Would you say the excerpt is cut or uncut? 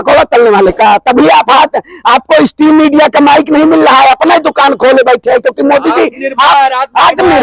uncut